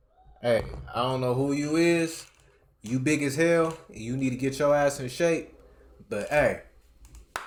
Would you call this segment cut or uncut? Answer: uncut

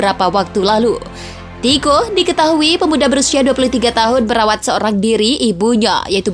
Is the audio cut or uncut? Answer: uncut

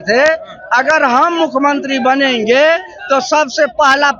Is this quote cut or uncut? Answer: uncut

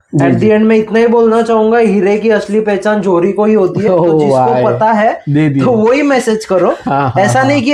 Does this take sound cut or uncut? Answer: uncut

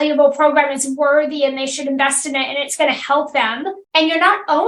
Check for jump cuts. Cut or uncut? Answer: cut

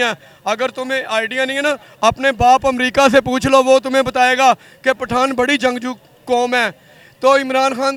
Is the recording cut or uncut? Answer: uncut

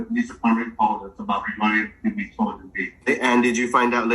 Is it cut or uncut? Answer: cut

